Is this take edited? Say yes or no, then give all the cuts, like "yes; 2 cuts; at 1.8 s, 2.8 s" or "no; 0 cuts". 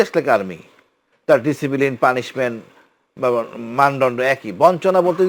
no; 0 cuts